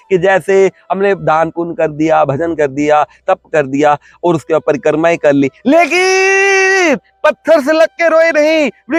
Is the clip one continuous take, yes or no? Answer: yes